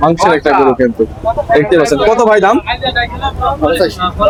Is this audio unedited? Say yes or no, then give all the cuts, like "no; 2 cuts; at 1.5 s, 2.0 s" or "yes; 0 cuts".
yes; 0 cuts